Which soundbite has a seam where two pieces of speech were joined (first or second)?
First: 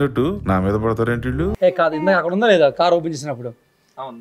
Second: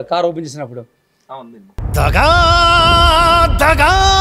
first